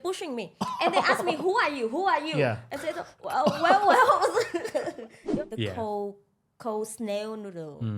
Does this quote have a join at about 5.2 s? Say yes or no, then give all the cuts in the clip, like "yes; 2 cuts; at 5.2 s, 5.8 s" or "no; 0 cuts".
yes; 1 cut; at 5.2 s